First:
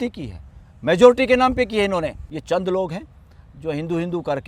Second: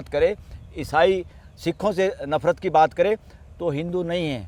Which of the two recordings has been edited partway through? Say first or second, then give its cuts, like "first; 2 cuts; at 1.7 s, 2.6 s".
first; 1 cut; at 2.2 s